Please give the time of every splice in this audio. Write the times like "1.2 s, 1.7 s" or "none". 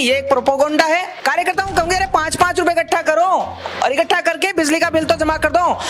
1.1 s